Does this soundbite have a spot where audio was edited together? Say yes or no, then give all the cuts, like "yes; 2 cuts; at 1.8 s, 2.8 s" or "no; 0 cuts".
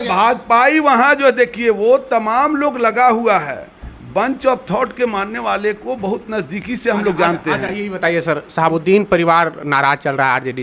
no; 0 cuts